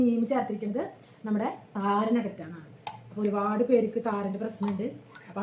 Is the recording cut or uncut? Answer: uncut